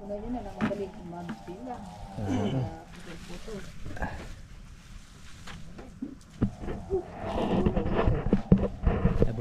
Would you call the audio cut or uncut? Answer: uncut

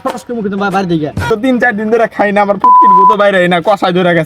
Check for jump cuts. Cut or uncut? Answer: cut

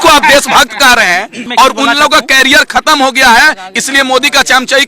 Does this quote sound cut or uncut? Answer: cut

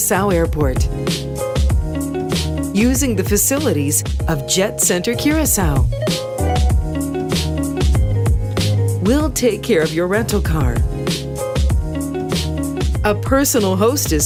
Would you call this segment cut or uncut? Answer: uncut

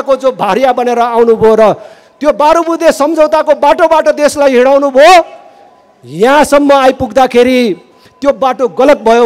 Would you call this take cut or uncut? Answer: uncut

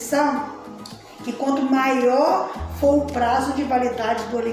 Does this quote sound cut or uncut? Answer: uncut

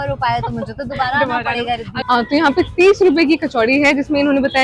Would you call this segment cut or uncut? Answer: cut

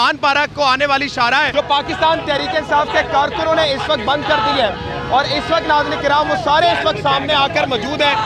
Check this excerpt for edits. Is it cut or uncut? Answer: uncut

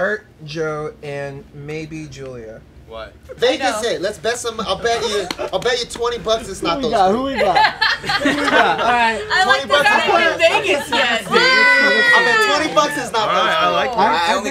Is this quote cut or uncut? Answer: cut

